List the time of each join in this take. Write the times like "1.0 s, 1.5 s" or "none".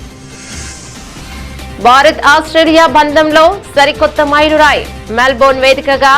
1.5 s